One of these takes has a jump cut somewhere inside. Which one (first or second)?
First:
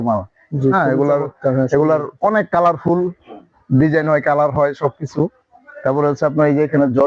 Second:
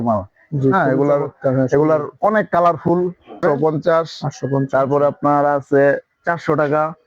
second